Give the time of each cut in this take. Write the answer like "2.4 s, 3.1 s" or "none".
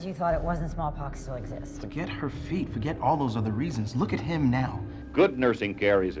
4.9 s